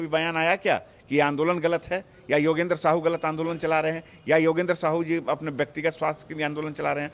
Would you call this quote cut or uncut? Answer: uncut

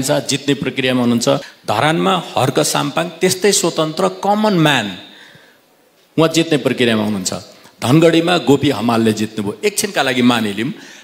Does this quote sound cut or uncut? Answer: cut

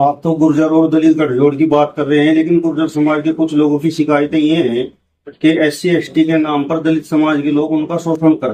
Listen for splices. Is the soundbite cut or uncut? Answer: uncut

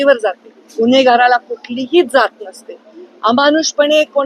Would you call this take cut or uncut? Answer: uncut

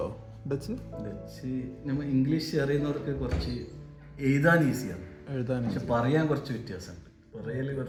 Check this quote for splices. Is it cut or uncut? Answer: uncut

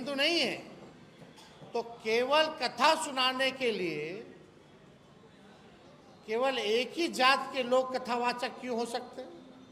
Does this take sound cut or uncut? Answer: uncut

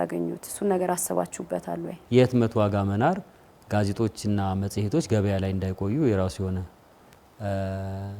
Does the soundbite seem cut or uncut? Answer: cut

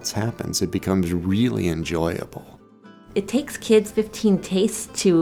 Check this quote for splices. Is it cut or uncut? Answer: cut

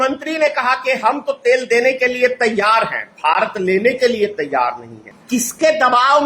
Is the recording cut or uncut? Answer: uncut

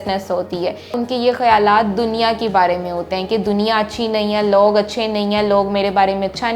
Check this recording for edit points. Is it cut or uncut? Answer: cut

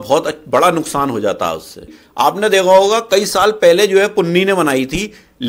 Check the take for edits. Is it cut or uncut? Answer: cut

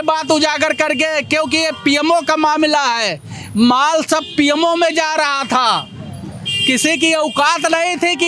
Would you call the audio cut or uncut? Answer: uncut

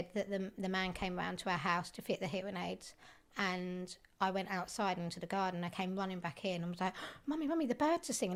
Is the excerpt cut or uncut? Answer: uncut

